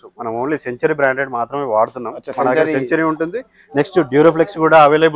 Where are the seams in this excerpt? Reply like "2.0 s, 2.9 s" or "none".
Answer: none